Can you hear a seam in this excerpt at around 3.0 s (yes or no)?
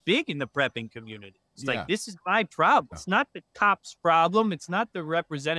yes